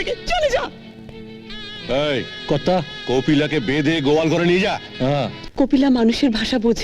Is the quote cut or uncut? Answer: cut